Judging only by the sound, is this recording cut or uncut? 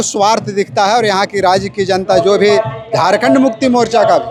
uncut